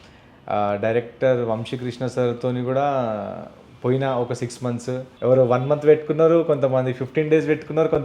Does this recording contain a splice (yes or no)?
yes